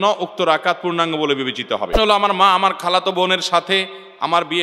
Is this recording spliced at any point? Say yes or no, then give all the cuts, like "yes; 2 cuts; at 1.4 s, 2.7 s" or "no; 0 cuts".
yes; 1 cut; at 1.9 s